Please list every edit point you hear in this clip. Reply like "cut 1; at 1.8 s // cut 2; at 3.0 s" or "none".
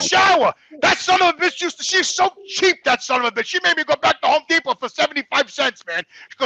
none